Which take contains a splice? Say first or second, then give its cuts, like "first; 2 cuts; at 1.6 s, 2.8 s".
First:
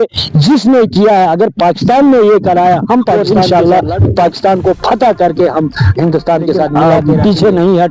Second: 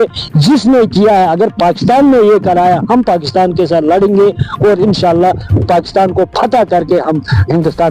first; 2 cuts; at 3.2 s, 6.9 s